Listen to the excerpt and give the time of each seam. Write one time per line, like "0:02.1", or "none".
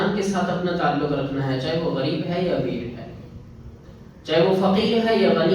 none